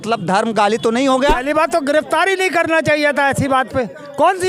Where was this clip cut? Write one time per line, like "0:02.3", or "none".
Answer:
0:01.4